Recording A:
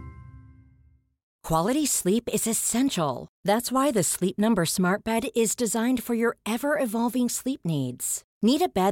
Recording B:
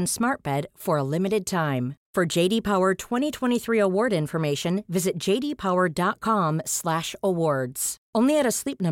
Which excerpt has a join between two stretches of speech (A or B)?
A